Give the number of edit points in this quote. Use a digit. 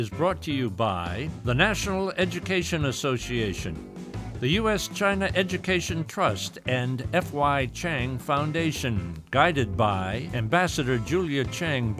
1